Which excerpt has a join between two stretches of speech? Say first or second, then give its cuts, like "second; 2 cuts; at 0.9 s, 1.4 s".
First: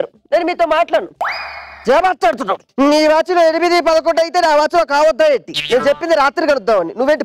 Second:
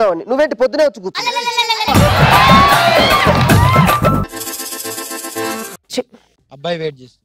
second; 2 cuts; at 1.9 s, 4.2 s